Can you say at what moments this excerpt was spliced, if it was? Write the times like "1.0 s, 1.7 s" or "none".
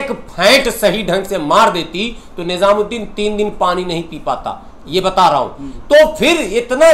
none